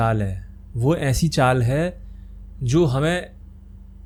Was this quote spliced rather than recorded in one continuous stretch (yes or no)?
no